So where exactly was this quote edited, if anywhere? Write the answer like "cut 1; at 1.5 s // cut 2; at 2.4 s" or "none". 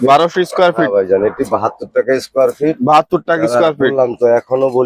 none